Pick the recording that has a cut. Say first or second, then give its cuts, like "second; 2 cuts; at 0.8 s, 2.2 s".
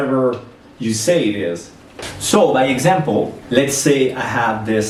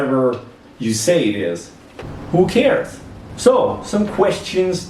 second; 1 cut; at 2.1 s